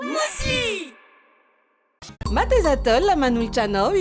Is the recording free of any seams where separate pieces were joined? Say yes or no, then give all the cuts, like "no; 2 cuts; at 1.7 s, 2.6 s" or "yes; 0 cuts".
no; 1 cut; at 2.1 s